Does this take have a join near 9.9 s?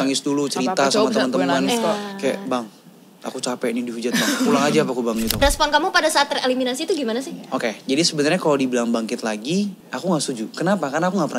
yes; 2 cuts; at 5.4 s, 9.9 s

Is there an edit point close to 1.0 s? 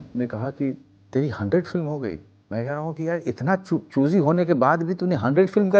no; 1 cut; at 2.4 s

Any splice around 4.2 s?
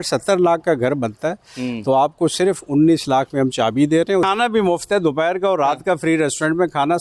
yes; 1 cut; at 4.2 s

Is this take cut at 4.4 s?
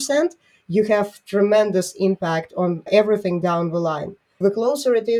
yes; 2 cuts; at 2.8 s, 4.4 s

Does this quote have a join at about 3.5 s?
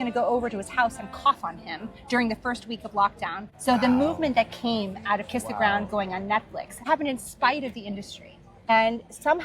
yes; 3 cuts; at 3.5 s, 6.9 s, 8.7 s

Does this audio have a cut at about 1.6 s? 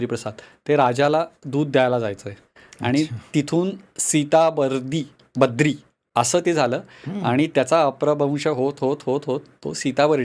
no; 0 cuts

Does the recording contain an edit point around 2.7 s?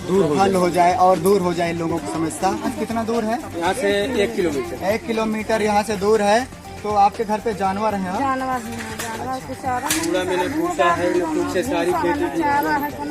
yes; 1 cut; at 2.7 s

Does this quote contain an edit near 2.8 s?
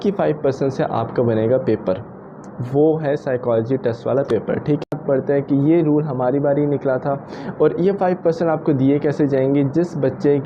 no; 1 cut; at 5.0 s

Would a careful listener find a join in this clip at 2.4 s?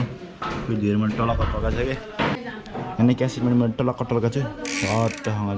yes; 1 cut; at 2.4 s

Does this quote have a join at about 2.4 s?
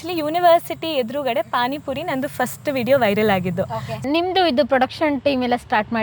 no; 1 cut; at 4.1 s

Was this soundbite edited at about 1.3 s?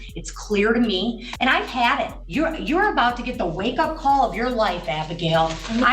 yes; 2 cuts; at 1.3 s, 2.2 s

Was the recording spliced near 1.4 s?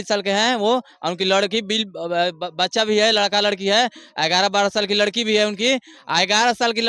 no; 0 cuts

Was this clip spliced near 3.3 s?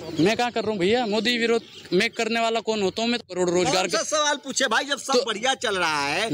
yes; 1 cut; at 3.3 s

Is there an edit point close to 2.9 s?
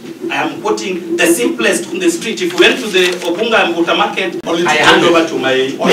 no; 1 cut; at 4.4 s

